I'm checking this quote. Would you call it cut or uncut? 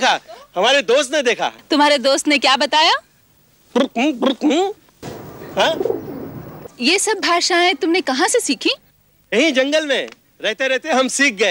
cut